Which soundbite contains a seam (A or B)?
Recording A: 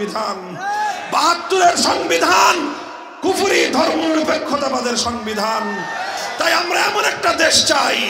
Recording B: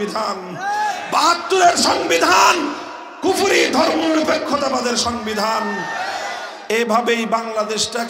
A